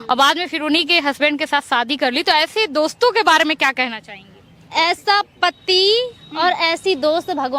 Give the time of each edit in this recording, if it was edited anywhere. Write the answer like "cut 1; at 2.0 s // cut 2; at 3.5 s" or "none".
none